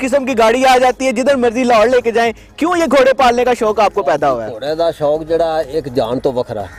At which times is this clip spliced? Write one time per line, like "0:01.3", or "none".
none